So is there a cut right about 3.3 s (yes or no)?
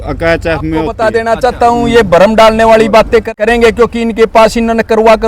yes